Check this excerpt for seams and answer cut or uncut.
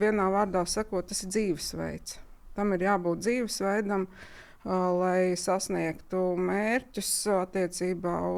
uncut